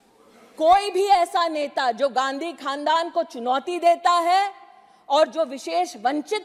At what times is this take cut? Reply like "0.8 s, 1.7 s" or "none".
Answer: none